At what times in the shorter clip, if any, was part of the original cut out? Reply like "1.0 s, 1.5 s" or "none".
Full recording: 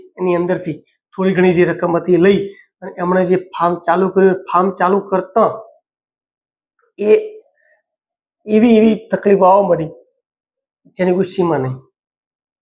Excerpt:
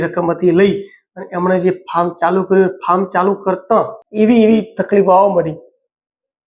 4.0 s